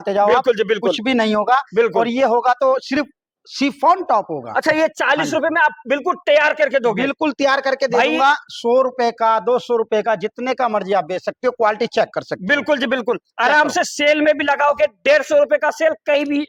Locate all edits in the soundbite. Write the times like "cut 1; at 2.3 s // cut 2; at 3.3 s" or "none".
none